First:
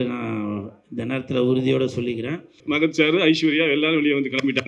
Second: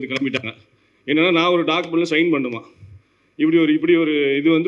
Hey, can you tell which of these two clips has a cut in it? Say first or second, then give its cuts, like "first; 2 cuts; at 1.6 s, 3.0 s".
first; 1 cut; at 2.6 s